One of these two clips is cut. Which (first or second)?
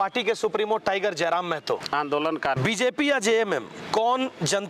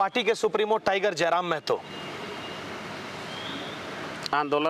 first